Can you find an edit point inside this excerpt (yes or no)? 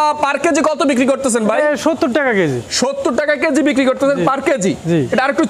no